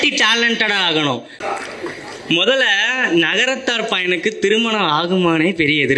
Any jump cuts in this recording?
yes; 1 cut; at 1.3 s

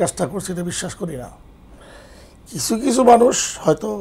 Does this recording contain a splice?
no; 0 cuts

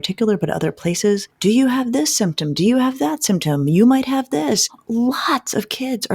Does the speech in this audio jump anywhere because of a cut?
yes; 2 cuts; at 1.3 s, 4.7 s

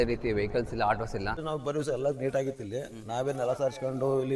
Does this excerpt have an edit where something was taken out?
yes; 1 cut; at 1.4 s

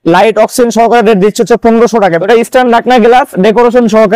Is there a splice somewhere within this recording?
yes; 1 cut; at 2.2 s

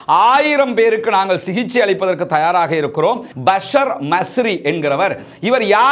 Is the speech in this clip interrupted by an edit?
yes; 1 cut; at 3.3 s

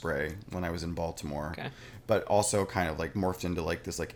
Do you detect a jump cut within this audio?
no; 0 cuts

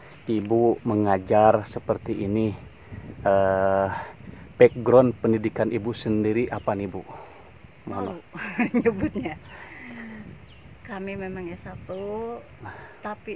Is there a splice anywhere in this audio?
no; 0 cuts

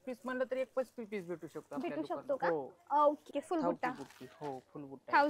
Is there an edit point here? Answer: yes; 1 cut; at 3.3 s

